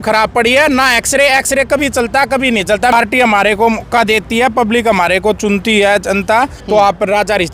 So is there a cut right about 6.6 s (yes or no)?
yes